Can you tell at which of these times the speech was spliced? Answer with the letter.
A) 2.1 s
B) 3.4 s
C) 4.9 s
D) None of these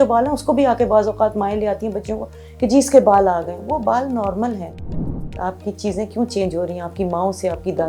C